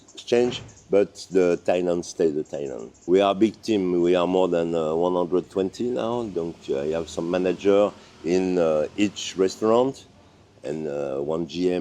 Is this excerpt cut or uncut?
cut